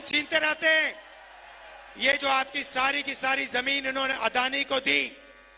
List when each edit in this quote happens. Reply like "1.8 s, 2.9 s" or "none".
none